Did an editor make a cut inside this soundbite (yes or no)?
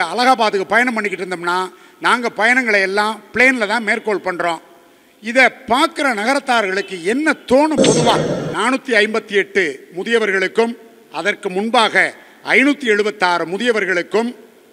yes